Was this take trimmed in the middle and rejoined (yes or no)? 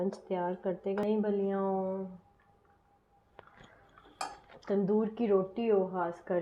yes